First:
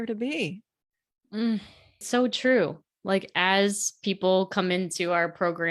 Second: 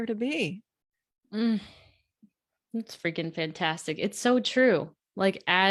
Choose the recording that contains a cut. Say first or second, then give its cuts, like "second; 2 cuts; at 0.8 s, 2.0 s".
first; 1 cut; at 2.0 s